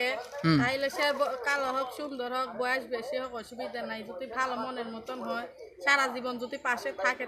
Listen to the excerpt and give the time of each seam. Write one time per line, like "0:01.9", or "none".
none